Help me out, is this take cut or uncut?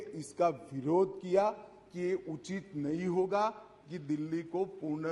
uncut